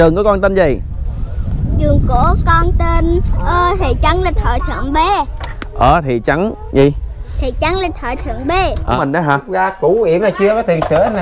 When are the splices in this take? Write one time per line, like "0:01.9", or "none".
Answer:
0:09.0